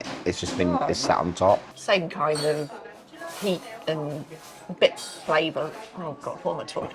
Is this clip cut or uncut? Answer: cut